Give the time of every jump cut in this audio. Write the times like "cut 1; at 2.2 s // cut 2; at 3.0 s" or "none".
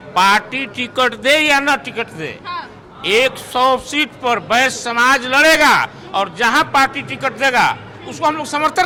none